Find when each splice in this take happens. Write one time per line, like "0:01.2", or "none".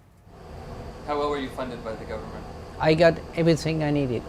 0:01.4